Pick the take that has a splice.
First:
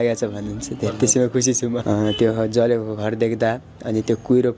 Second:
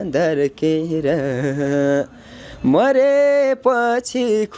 first; 1 cut; at 1.8 s

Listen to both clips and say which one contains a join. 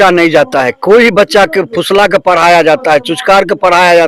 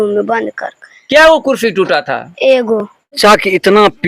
second; 1 cut; at 3.1 s

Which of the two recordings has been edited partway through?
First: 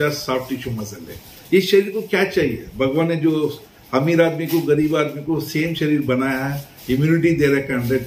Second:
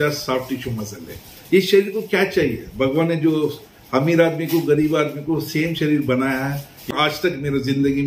second; 1 cut; at 6.9 s

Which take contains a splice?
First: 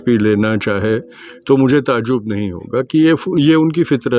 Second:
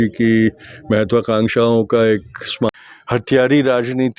second; 1 cut; at 2.7 s

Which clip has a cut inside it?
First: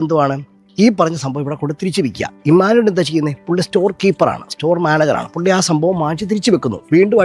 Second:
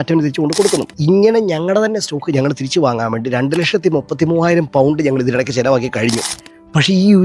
second; 2 cuts; at 0.9 s, 6.3 s

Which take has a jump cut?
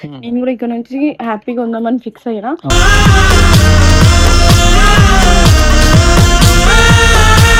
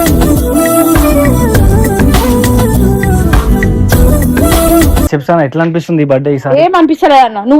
second; 1 cut; at 5.1 s

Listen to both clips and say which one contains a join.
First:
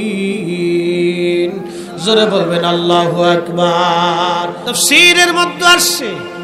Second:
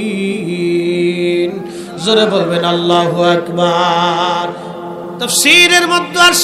first; 1 cut; at 4.7 s

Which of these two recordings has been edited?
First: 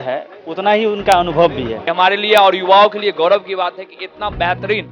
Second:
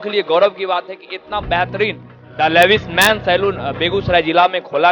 first; 1 cut; at 1.8 s

